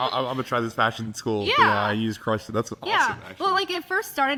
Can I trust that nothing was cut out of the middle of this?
yes; 0 cuts

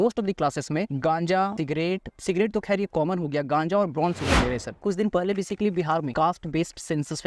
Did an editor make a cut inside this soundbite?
yes; 4 cuts; at 0.9 s, 1.6 s, 4.8 s, 6.1 s

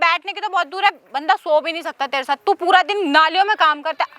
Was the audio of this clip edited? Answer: no; 0 cuts

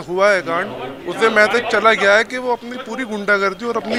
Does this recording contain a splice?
no; 0 cuts

